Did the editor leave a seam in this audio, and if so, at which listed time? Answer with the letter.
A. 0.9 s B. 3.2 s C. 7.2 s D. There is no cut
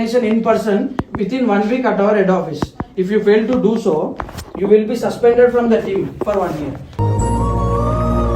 D